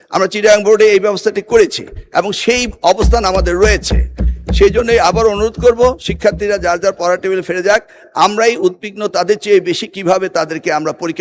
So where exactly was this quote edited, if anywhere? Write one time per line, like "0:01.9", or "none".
none